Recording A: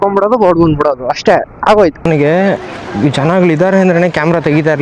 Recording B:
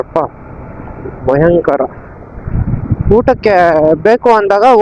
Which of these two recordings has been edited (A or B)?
A